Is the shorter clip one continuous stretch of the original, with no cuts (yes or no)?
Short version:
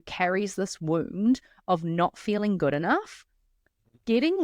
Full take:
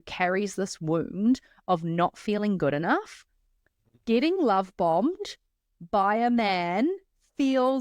yes